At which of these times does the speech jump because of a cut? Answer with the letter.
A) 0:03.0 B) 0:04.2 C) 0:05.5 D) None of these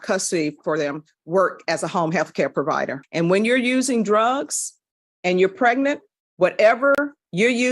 A